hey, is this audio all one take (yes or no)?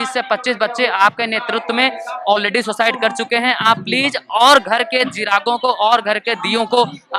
yes